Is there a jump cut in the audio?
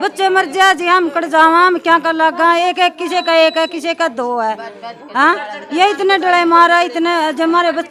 no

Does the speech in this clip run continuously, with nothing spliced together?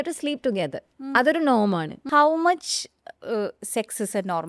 no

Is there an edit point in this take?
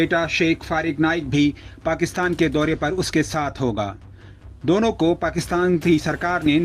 no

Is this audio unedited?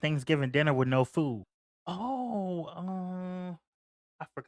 no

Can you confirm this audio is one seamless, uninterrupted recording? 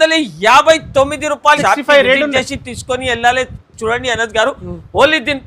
no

